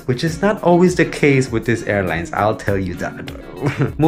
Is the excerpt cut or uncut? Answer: uncut